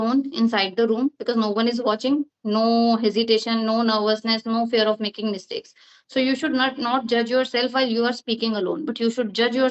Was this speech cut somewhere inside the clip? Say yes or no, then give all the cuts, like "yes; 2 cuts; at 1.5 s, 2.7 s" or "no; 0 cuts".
no; 0 cuts